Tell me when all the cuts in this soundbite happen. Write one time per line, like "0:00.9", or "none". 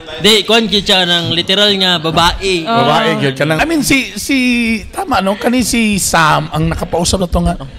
0:03.6